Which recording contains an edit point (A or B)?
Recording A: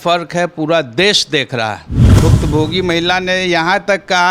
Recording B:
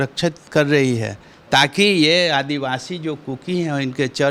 A